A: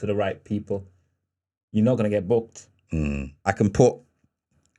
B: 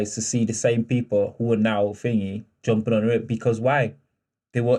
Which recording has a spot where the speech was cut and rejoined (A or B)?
A